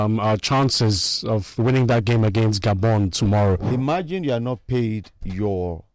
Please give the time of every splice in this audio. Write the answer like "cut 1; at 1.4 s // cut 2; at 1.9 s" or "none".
cut 1; at 3.7 s